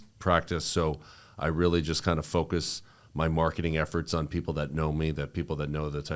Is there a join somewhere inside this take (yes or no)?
no